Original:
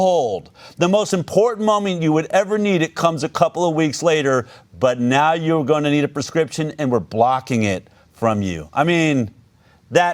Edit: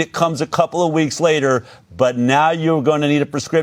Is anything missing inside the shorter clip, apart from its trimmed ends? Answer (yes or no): no